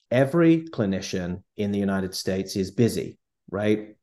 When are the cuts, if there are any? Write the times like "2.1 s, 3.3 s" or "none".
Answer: none